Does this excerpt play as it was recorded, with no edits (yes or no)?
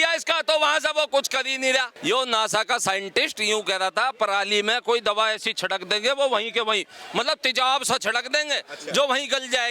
no